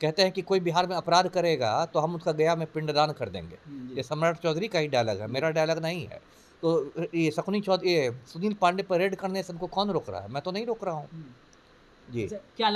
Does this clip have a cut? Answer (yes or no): no